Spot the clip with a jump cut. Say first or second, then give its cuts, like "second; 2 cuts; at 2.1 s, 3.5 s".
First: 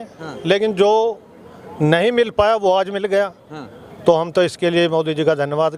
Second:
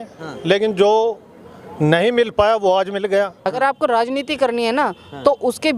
second; 1 cut; at 3.5 s